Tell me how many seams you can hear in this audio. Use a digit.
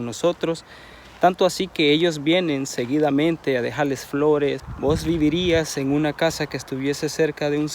1